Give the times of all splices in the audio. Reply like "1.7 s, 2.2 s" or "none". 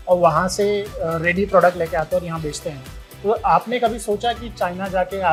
none

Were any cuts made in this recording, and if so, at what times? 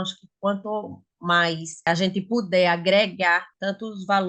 1.9 s

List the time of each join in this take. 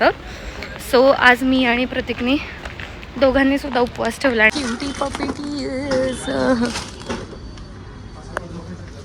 4.5 s

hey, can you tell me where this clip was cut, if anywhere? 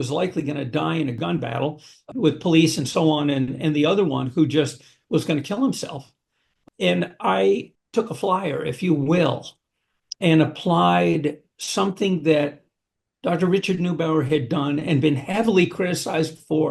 1.2 s

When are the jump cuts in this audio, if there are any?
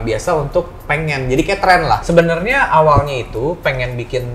2.0 s

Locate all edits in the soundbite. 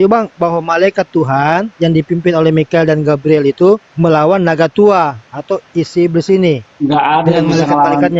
3.9 s, 6.7 s

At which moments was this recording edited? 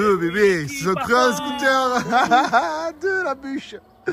none

